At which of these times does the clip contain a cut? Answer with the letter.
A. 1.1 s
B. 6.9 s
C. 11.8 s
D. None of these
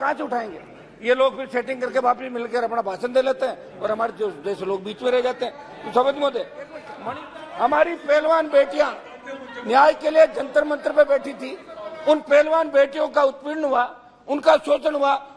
B